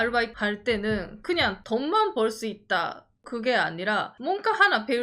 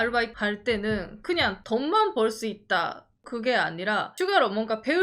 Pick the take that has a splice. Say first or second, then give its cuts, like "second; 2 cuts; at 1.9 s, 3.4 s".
first; 1 cut; at 4.1 s